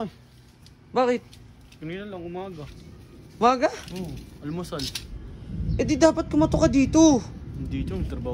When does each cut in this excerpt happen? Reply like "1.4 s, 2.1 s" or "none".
none